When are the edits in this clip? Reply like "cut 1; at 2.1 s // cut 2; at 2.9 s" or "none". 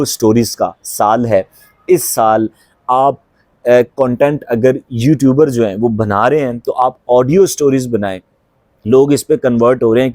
none